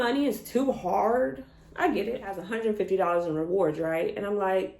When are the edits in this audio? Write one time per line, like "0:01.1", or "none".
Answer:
0:02.5